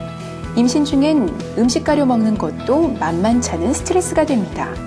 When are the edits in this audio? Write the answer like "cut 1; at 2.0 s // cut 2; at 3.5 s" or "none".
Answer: cut 1; at 1.9 s

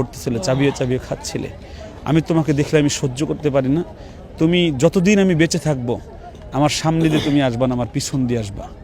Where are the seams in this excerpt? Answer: none

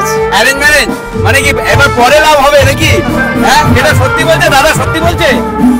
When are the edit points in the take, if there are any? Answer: none

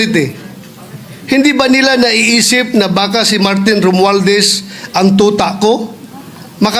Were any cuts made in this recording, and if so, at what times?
none

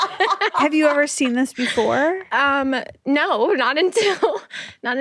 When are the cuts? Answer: none

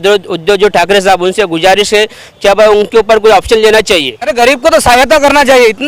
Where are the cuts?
cut 1; at 4.3 s

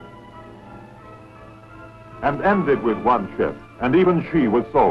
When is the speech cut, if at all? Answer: cut 1; at 1.5 s

